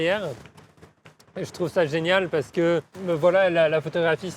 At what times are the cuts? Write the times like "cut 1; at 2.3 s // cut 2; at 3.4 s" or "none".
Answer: cut 1; at 2.9 s

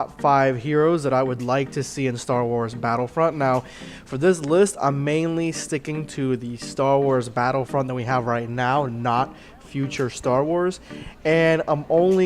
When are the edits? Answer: cut 1; at 9.0 s

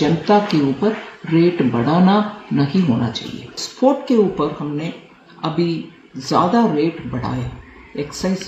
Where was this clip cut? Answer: cut 1; at 3.6 s

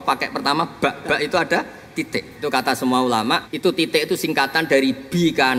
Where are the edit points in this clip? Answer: cut 1; at 1.9 s // cut 2; at 3.5 s

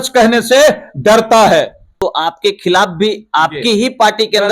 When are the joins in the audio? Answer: cut 1; at 2.0 s

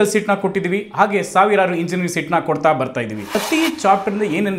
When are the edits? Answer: cut 1; at 3.4 s

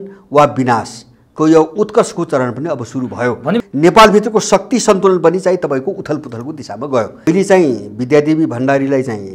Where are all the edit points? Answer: cut 1; at 3.6 s // cut 2; at 7.3 s

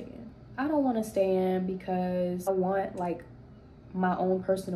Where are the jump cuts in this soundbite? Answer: cut 1; at 2.5 s

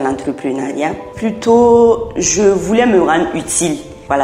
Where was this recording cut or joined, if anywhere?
none

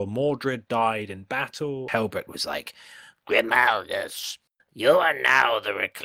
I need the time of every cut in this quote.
cut 1; at 1.9 s

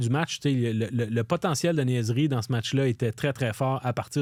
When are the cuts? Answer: none

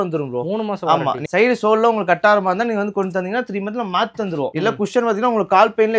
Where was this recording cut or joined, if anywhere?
cut 1; at 1.3 s // cut 2; at 4.5 s

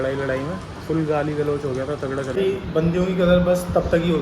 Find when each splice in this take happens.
cut 1; at 2.3 s

